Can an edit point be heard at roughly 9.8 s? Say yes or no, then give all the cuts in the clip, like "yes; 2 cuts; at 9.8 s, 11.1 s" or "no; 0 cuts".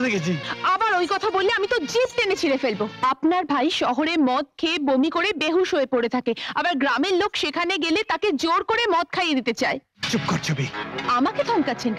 no; 1 cut; at 2.9 s